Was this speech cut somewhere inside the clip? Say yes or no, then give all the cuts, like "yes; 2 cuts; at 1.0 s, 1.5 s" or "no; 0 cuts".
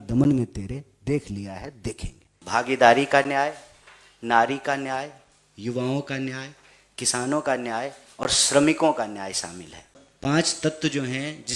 yes; 2 cuts; at 2.3 s, 10.0 s